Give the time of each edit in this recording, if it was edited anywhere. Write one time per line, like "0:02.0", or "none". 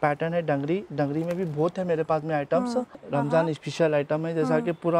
0:03.0